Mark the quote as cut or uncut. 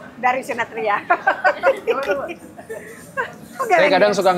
cut